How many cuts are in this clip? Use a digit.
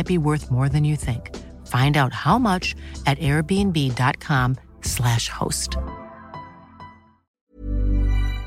1